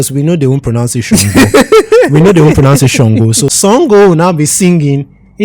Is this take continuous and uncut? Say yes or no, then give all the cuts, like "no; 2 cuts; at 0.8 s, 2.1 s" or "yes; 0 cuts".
no; 1 cut; at 3.5 s